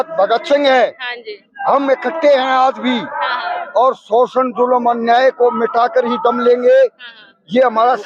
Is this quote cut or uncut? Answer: uncut